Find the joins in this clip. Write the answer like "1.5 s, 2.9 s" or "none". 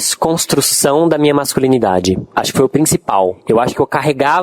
2.3 s, 3.4 s